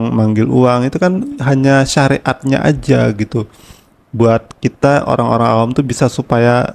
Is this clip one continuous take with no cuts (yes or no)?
yes